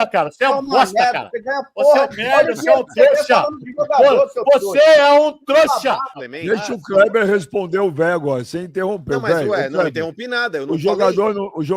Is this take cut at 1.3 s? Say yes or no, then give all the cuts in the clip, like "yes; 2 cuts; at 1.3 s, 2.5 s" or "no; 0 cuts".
no; 1 cut; at 6.1 s